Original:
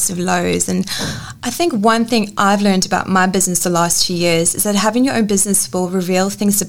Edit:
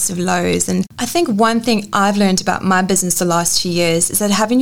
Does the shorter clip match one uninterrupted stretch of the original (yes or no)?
no